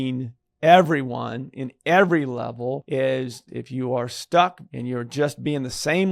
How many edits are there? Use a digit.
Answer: 3